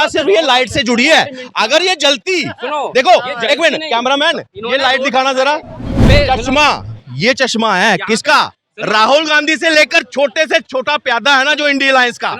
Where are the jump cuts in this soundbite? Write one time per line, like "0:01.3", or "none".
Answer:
0:06.0